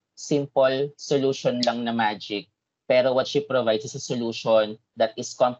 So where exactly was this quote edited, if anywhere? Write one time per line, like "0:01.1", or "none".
none